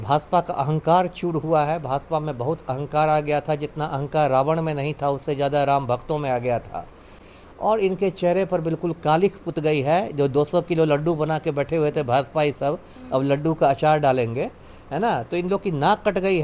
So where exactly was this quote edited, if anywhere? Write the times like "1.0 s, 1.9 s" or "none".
7.2 s